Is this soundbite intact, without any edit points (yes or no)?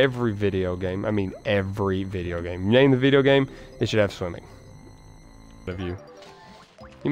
no